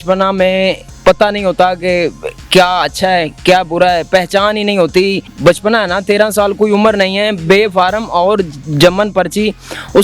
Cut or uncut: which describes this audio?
cut